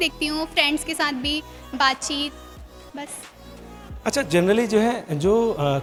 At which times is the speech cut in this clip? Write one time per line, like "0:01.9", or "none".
none